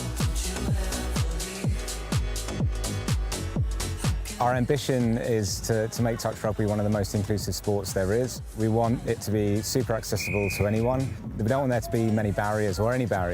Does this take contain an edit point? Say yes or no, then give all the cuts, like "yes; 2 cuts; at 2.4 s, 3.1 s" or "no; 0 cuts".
yes; 1 cut; at 1.5 s